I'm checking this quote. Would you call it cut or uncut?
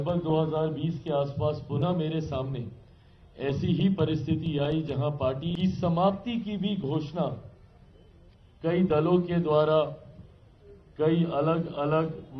cut